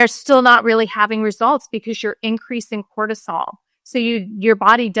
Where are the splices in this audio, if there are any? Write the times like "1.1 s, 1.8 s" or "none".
none

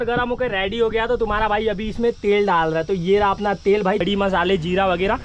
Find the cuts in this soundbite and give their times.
4.0 s

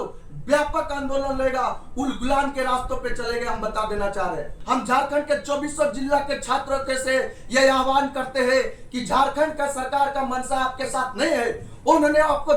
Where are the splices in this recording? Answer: 4.5 s

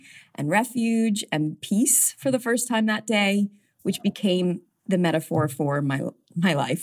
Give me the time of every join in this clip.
1.6 s, 4.7 s

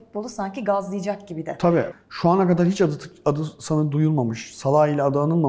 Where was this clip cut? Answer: 1.9 s

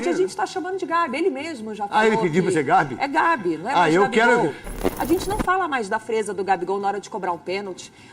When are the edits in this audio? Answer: 4.8 s

